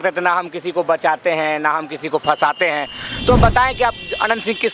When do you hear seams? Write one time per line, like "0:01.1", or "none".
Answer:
0:03.0